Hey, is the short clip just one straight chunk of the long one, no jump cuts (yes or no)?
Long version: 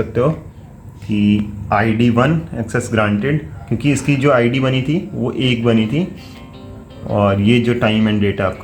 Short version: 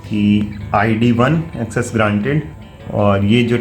no